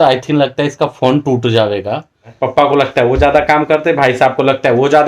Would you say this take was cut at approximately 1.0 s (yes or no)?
no